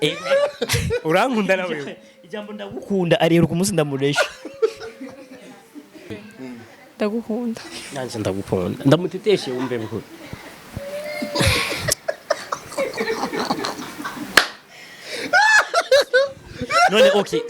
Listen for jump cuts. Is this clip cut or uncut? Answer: cut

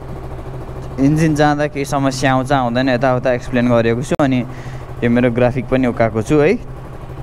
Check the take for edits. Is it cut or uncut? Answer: uncut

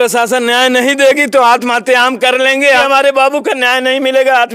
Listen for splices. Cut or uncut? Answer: cut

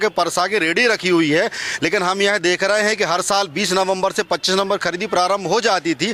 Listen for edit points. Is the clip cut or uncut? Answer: uncut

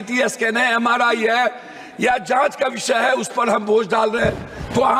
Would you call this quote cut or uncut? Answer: uncut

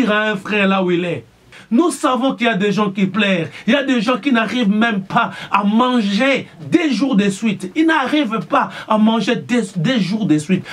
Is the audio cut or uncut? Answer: cut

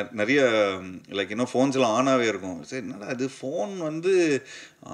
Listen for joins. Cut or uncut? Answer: uncut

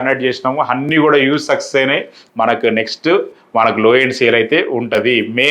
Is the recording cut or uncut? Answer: cut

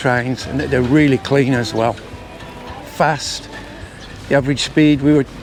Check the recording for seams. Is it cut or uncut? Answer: uncut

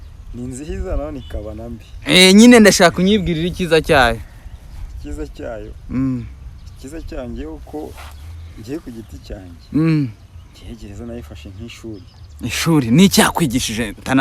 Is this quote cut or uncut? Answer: uncut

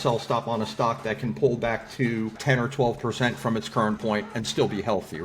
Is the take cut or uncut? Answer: cut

